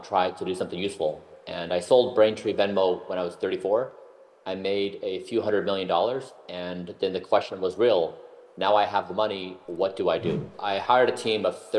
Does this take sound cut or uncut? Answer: cut